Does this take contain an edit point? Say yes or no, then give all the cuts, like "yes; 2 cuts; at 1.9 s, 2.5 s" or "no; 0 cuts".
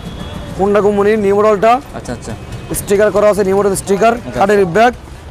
no; 0 cuts